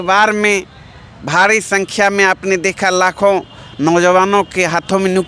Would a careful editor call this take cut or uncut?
uncut